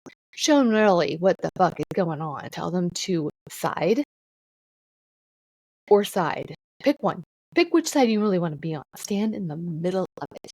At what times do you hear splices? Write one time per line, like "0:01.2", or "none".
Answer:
0:02.5
0:03.5
0:06.6
0:07.3